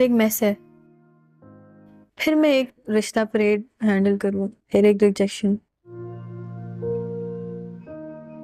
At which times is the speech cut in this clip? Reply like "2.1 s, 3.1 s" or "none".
none